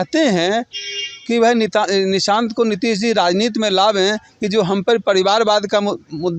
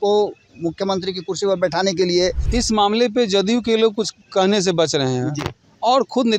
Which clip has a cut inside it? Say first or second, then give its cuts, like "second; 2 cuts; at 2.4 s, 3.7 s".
second; 1 cut; at 2.4 s